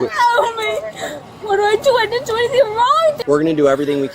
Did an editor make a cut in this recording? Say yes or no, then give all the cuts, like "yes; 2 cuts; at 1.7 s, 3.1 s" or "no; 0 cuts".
yes; 1 cut; at 3.2 s